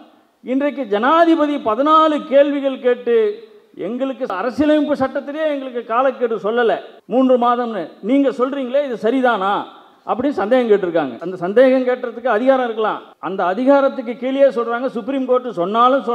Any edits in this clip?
yes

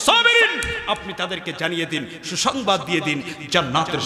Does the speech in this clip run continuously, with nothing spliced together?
yes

